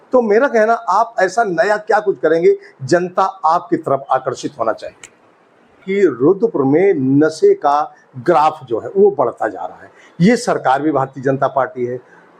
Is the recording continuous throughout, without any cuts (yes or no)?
no